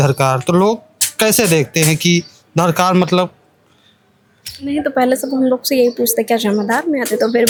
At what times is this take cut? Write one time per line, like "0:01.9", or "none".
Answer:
none